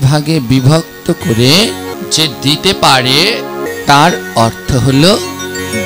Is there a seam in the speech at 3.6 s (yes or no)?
yes